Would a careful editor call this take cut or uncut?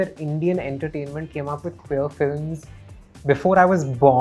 uncut